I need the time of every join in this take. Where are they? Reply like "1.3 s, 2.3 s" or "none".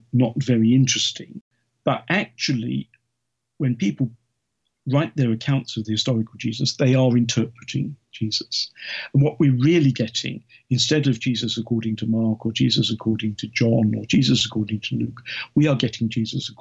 1.4 s